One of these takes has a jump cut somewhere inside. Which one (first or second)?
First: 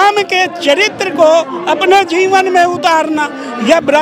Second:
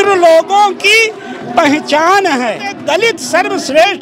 second